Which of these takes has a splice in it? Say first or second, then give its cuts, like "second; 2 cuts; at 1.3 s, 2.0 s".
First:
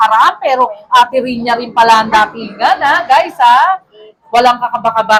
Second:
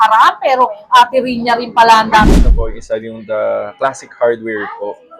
second; 1 cut; at 2.4 s